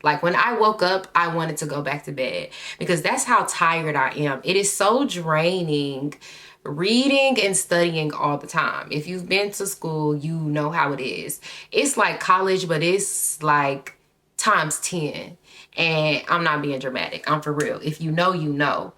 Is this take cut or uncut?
uncut